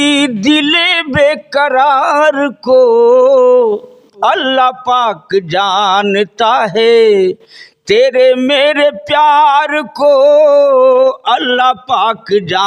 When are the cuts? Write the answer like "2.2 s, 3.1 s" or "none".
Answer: none